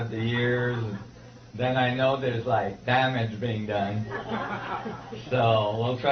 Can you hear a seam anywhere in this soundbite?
no; 0 cuts

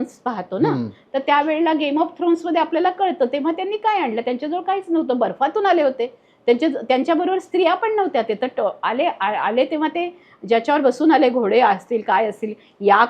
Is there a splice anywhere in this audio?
no; 0 cuts

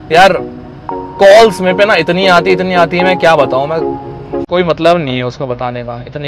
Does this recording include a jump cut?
no; 0 cuts

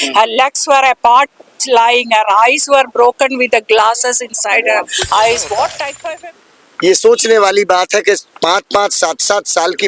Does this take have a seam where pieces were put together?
yes; 1 cut; at 6.0 s

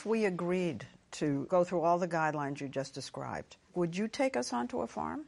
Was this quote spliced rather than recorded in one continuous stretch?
yes; 2 cuts; at 1.5 s, 3.7 s

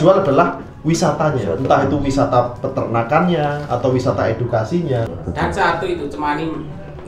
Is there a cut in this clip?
yes; 1 cut; at 5.1 s

